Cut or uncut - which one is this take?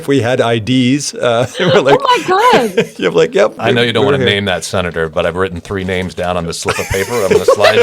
cut